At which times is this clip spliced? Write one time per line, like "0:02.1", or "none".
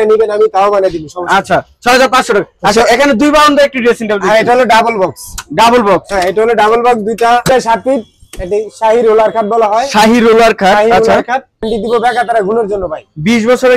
0:07.5
0:11.7